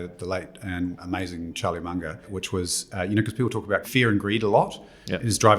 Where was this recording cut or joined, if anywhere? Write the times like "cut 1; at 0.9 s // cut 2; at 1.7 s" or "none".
cut 1; at 1.0 s // cut 2; at 2.3 s // cut 3; at 3.9 s